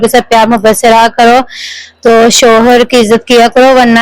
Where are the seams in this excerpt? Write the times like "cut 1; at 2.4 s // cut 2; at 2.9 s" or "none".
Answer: none